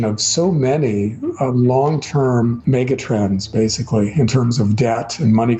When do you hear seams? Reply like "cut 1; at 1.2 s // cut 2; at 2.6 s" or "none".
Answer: cut 1; at 2.6 s